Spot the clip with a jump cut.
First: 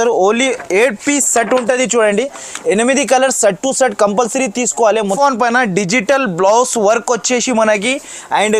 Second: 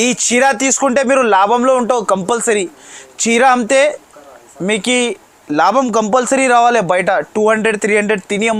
first; 1 cut; at 5.2 s

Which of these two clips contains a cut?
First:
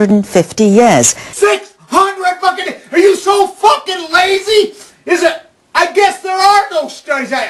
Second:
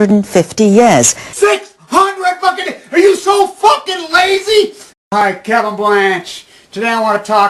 first; 1 cut; at 4.9 s

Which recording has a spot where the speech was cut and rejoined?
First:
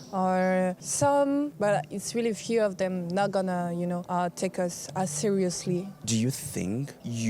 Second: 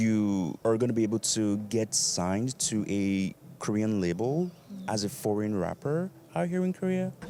first; 4 cuts; at 0.8 s, 1.5 s, 4.0 s, 6.0 s

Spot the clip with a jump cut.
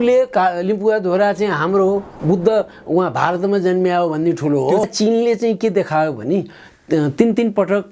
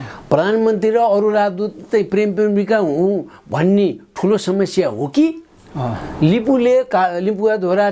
first; 1 cut; at 4.8 s

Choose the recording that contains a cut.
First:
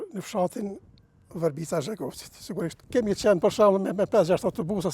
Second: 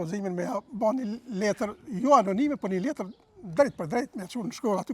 first; 1 cut; at 2.8 s

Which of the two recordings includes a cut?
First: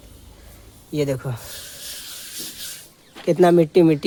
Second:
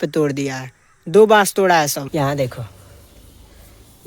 second; 1 cut; at 2.0 s

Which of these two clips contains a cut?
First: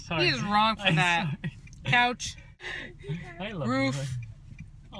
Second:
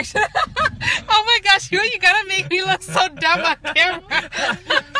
first; 1 cut; at 2.5 s

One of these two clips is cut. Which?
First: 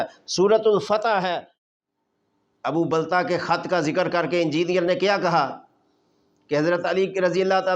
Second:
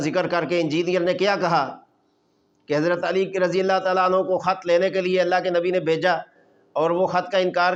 first; 1 cut; at 1.7 s

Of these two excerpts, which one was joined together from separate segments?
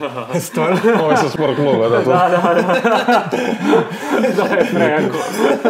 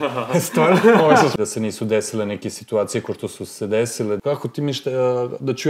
second; 2 cuts; at 1.3 s, 4.2 s

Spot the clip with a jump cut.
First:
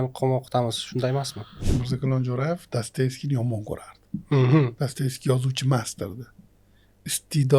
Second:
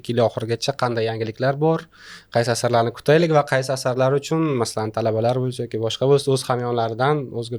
first; 1 cut; at 1.6 s

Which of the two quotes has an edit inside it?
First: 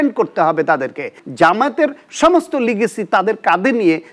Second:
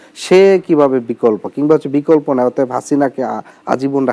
first; 1 cut; at 1.2 s

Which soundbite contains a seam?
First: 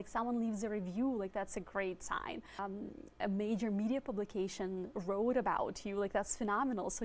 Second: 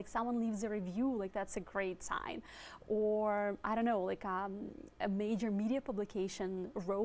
first; 1 cut; at 2.6 s

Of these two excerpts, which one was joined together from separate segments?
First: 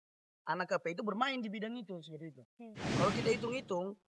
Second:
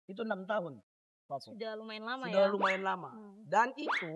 first; 1 cut; at 3.0 s

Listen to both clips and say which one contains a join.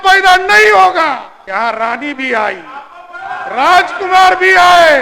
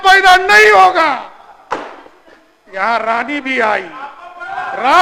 first; 1 cut; at 1.3 s

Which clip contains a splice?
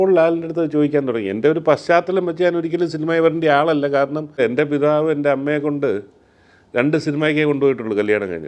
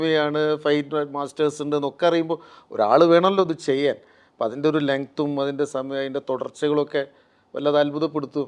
first; 1 cut; at 4.4 s

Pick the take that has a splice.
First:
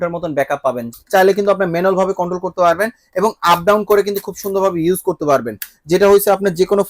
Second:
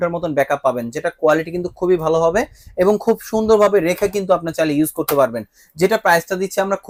first; 1 cut; at 0.9 s

